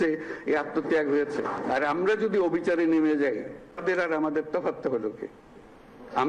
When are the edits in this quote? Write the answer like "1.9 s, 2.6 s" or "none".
3.8 s